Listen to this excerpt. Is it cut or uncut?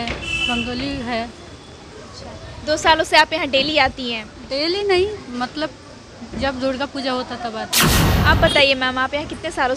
cut